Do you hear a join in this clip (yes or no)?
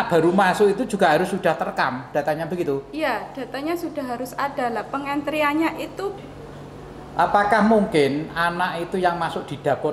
yes